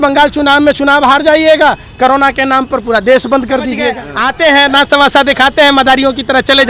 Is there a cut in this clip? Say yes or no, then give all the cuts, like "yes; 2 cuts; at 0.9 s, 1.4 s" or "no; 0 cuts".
yes; 1 cut; at 4.1 s